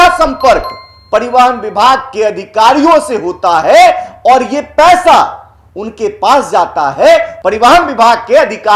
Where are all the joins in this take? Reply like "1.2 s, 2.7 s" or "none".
7.3 s